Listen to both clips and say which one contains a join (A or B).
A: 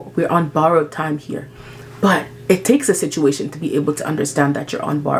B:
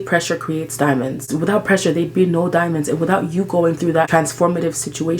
B